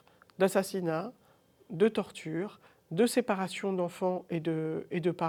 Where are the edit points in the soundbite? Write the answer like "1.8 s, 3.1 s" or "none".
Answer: none